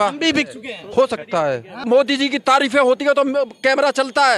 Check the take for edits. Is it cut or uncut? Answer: cut